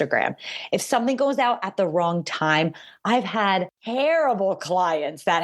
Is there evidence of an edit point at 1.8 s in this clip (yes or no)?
no